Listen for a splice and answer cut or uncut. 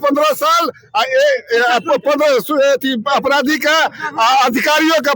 uncut